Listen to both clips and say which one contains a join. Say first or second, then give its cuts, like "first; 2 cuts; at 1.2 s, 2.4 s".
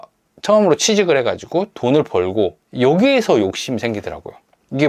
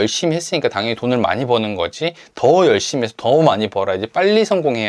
first; 1 cut; at 2.6 s